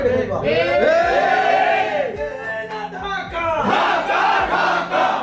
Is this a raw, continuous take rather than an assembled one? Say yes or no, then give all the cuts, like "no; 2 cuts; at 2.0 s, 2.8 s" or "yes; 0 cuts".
yes; 0 cuts